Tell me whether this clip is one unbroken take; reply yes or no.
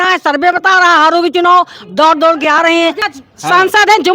no